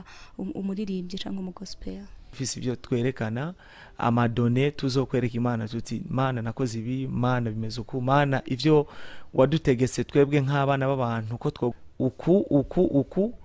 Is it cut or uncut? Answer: cut